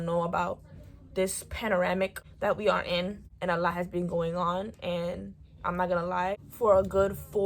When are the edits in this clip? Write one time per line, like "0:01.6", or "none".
0:02.2
0:03.3
0:06.4